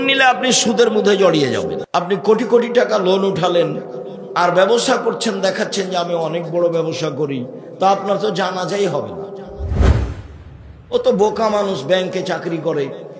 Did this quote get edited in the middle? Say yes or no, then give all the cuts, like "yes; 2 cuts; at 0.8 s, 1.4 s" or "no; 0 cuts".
yes; 1 cut; at 1.8 s